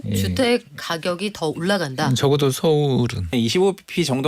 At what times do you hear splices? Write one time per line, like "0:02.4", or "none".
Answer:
0:03.3